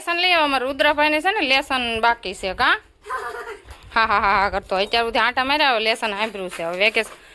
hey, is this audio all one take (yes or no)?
yes